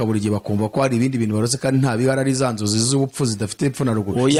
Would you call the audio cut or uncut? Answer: uncut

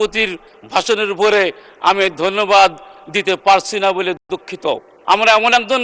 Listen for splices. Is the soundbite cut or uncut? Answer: cut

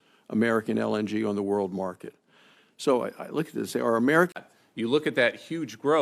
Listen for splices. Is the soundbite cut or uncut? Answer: uncut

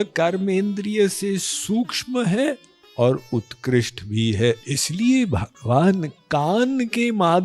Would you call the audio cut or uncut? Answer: cut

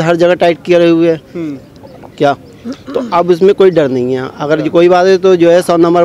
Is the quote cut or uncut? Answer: uncut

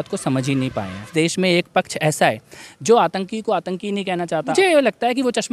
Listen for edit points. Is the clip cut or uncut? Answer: cut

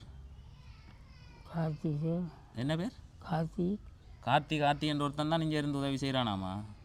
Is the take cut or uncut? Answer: uncut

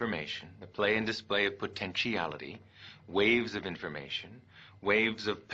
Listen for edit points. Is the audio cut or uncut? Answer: cut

